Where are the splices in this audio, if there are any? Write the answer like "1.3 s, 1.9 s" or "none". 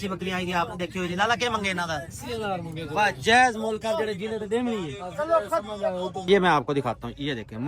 6.2 s